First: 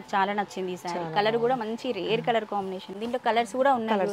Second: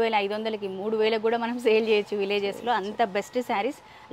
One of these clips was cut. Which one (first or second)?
first